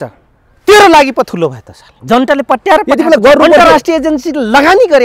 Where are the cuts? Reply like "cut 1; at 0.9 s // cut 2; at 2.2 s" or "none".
cut 1; at 1.9 s